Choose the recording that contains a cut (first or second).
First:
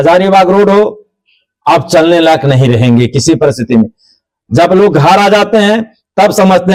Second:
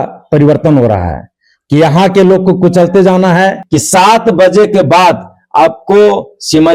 second